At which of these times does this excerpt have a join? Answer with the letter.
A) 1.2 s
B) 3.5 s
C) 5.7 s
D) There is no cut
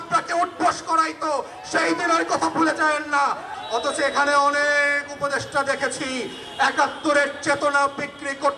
B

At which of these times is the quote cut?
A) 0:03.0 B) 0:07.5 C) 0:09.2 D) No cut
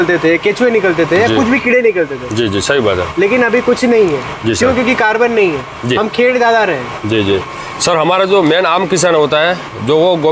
B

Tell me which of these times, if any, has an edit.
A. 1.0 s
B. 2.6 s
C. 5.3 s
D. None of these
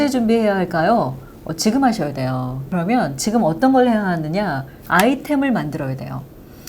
B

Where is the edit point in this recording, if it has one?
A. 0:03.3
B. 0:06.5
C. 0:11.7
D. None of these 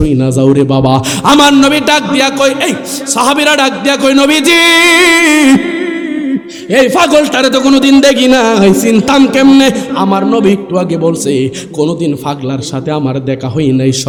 D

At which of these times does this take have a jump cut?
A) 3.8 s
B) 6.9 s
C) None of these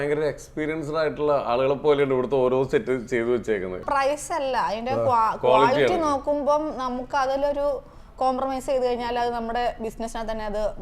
A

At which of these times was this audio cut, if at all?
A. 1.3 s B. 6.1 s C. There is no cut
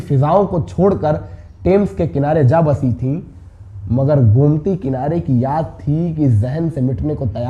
C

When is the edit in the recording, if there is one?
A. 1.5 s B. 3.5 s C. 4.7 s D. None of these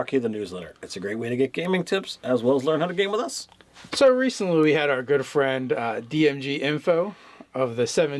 C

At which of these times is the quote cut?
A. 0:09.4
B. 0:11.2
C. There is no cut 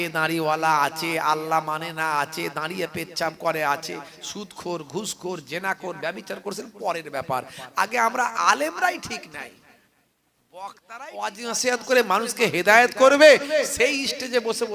B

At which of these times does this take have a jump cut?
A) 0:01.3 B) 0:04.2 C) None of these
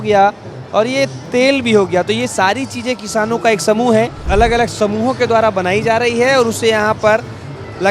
B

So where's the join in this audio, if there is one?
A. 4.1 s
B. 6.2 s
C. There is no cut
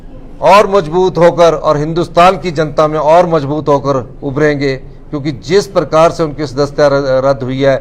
C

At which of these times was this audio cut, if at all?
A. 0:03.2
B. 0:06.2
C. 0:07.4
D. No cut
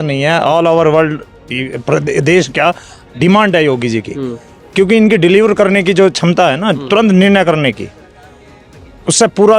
D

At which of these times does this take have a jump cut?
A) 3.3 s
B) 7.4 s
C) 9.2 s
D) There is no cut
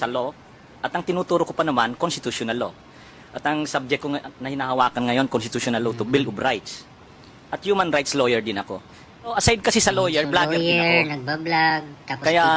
C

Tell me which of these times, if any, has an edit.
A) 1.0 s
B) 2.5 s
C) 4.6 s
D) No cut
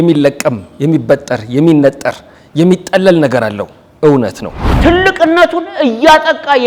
C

